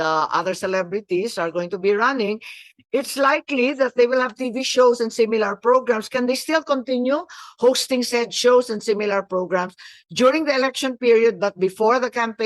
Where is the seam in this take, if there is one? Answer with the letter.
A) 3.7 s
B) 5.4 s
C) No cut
C